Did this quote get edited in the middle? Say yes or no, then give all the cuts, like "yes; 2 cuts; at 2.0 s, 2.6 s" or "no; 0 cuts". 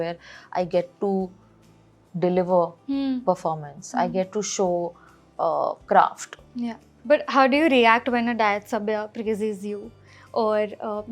no; 0 cuts